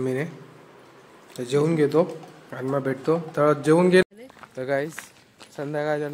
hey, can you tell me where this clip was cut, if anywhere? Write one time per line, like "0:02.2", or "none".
0:04.0